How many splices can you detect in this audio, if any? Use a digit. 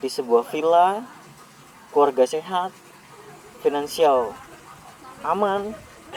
0